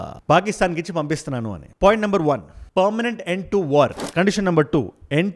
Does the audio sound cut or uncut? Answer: cut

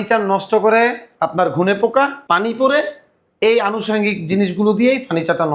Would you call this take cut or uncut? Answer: uncut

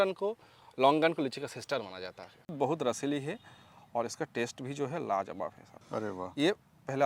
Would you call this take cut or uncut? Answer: cut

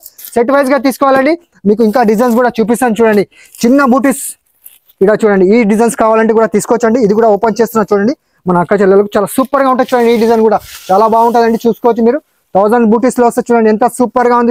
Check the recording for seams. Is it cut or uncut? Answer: uncut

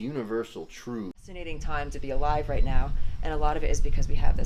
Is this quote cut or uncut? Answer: cut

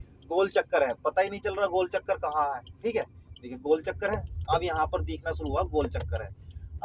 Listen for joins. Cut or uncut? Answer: uncut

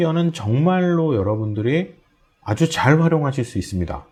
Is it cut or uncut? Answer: uncut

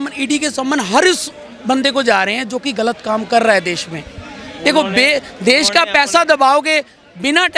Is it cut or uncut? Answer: uncut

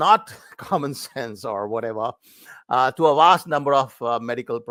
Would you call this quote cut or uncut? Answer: uncut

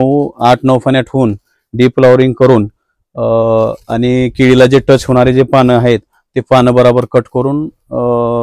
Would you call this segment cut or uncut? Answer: uncut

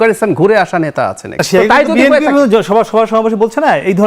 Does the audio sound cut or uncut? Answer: cut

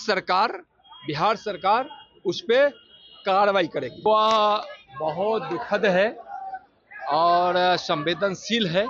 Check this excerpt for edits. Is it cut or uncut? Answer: cut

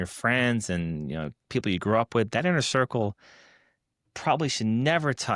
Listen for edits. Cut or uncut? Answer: uncut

